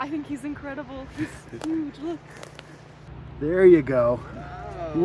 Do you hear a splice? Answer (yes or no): yes